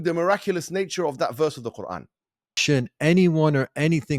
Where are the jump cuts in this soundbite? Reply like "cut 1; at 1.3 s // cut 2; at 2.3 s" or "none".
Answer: cut 1; at 2.6 s